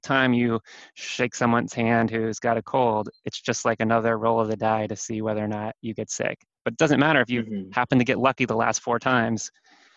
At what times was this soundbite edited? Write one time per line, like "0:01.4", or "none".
none